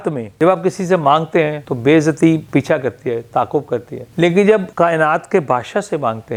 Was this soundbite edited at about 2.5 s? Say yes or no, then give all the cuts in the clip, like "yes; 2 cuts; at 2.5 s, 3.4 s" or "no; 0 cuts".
no; 0 cuts